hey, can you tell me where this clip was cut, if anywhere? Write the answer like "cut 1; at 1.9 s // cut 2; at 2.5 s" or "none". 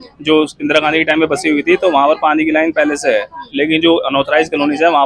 none